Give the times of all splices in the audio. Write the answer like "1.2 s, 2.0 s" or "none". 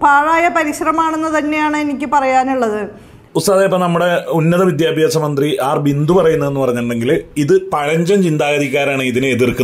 none